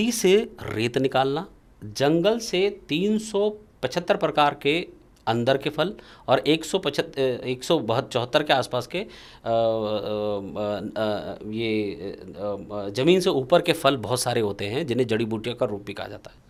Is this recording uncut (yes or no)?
yes